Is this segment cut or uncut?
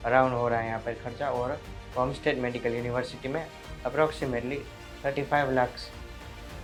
uncut